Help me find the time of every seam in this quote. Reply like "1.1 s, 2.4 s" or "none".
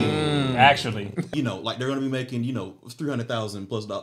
1.2 s